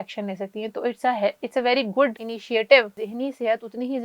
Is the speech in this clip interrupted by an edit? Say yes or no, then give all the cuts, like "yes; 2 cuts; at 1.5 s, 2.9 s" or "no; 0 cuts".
yes; 2 cuts; at 2.3 s, 3.0 s